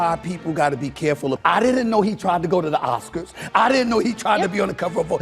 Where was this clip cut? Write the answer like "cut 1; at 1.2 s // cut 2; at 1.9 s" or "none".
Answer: cut 1; at 1.4 s